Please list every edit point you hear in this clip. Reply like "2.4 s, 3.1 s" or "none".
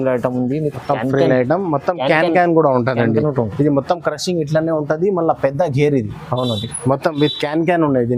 none